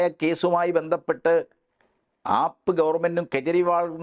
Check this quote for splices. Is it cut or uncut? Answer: uncut